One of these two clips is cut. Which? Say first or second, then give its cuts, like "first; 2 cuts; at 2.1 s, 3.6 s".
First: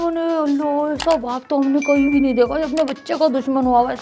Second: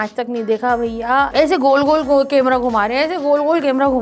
second; 1 cut; at 1.3 s